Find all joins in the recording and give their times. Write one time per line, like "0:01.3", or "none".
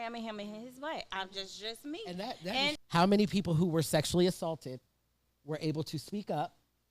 0:02.8